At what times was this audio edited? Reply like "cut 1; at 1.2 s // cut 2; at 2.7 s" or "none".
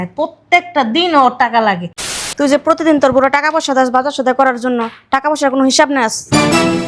cut 1; at 2.1 s